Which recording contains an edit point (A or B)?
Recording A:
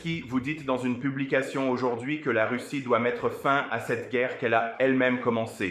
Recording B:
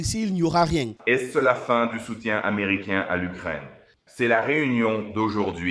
B